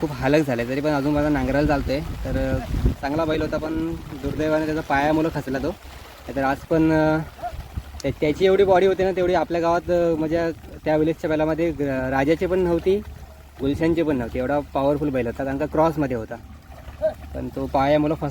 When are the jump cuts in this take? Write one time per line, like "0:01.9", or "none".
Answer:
none